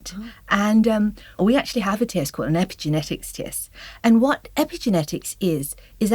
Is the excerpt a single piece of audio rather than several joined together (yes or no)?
no